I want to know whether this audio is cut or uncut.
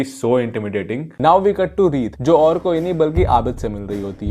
cut